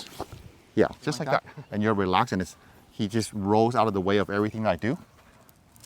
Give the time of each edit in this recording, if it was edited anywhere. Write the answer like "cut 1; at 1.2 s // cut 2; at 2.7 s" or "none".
cut 1; at 1.5 s